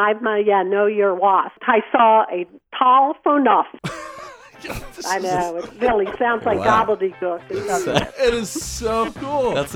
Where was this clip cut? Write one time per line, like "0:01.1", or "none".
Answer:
0:01.6
0:03.8